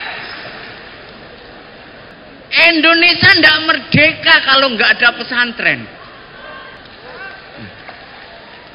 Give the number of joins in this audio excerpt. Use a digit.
2